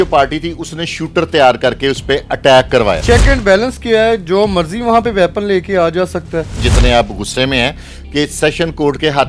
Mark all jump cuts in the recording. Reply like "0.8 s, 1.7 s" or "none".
3.0 s, 6.6 s